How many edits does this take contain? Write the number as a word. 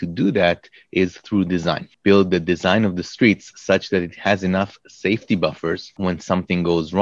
two